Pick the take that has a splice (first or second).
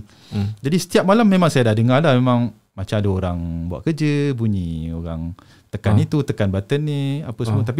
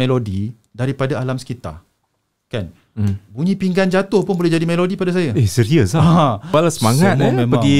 second